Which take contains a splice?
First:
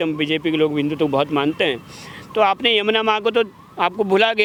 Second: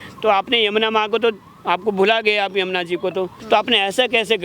second; 1 cut; at 3.4 s

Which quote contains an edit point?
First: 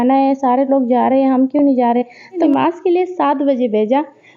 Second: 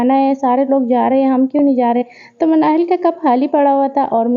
first; 1 cut; at 2.4 s

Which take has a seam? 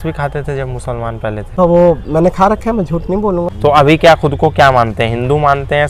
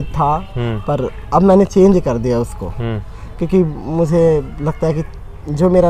first; 2 cuts; at 1.6 s, 3.5 s

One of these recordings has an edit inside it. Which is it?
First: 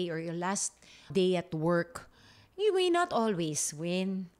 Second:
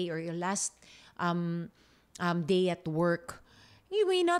first; 1 cut; at 1.1 s

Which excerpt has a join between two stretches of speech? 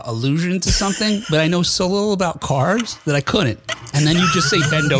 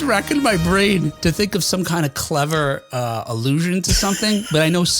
second; 1 cut; at 1.1 s

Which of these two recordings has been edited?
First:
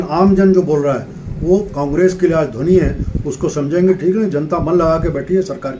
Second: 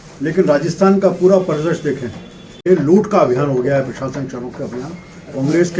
second; 1 cut; at 2.6 s

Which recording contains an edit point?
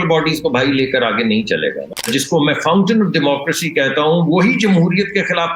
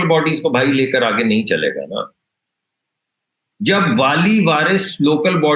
first; 1 cut; at 2.1 s

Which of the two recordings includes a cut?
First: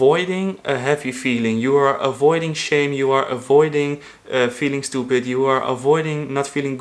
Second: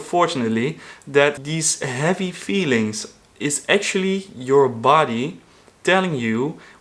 second; 1 cut; at 1.4 s

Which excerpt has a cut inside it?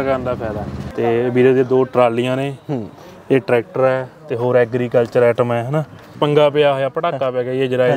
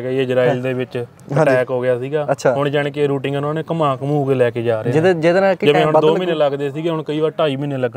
first; 2 cuts; at 0.8 s, 6.2 s

